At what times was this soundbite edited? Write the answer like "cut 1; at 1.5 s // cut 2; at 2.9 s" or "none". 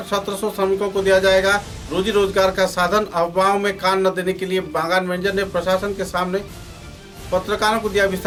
none